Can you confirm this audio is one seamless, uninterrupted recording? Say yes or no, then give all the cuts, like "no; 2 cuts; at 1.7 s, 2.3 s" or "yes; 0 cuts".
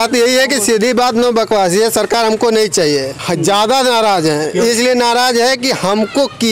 yes; 0 cuts